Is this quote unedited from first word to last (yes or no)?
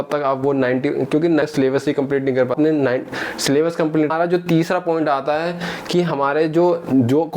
no